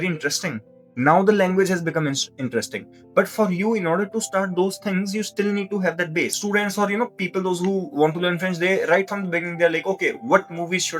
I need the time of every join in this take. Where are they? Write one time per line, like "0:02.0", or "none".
none